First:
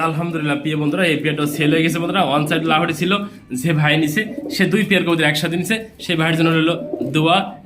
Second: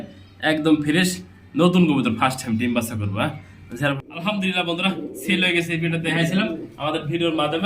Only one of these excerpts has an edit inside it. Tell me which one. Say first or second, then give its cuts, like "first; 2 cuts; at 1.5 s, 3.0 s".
second; 1 cut; at 4.0 s